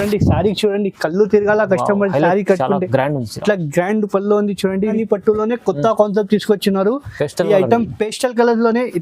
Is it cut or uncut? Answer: cut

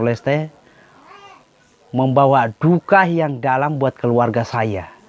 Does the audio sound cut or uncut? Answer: uncut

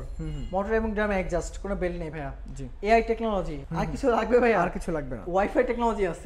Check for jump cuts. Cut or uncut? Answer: cut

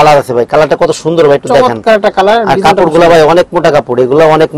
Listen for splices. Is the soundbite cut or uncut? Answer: uncut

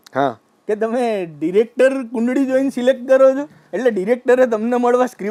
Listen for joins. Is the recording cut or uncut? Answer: uncut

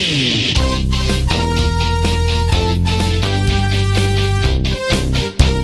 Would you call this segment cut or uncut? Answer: uncut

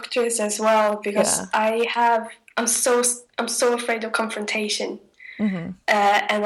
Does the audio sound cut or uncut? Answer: uncut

